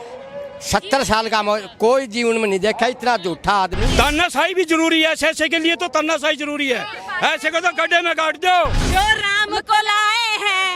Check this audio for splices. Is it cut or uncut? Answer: cut